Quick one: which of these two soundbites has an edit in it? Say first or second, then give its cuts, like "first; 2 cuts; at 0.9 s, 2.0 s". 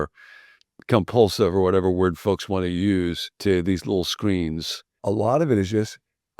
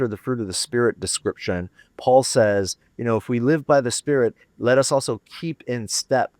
first; 1 cut; at 4.9 s